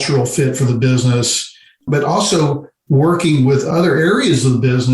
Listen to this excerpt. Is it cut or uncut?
cut